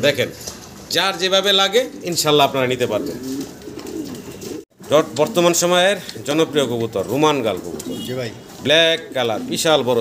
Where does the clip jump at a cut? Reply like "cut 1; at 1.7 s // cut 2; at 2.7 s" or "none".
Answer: none